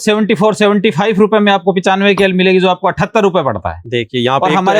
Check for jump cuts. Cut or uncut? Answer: uncut